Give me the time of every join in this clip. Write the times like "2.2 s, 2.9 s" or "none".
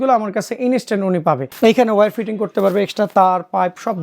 1.5 s